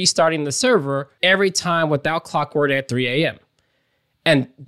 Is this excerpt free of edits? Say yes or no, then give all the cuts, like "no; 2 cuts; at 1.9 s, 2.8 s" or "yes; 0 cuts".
no; 1 cut; at 1.1 s